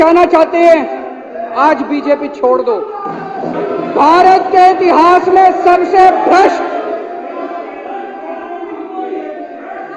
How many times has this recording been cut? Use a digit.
1